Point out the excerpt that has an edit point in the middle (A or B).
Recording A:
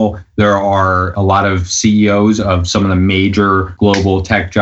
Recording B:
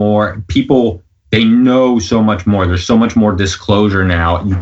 A